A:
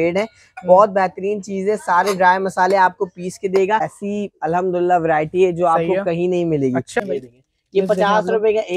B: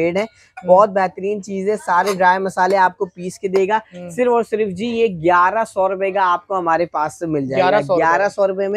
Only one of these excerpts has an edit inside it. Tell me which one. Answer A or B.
A